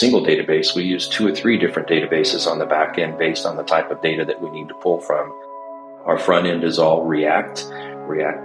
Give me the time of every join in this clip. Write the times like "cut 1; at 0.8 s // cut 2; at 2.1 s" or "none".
none